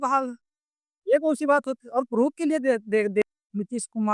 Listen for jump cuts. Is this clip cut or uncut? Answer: cut